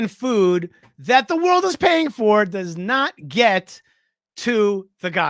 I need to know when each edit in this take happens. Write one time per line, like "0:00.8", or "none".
none